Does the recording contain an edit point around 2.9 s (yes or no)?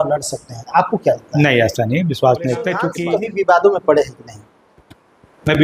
yes